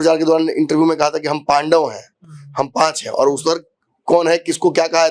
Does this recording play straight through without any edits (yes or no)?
yes